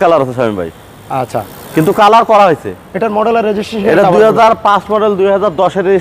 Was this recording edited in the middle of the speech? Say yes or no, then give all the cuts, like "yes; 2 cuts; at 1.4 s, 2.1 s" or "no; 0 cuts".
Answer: no; 0 cuts